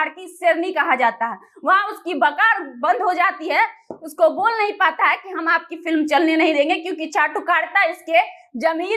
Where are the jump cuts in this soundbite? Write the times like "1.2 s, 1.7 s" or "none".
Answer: none